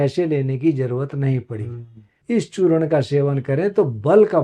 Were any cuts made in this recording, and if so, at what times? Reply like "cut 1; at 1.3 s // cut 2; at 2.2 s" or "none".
cut 1; at 2.1 s